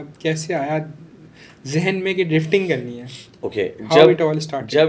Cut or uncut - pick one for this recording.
uncut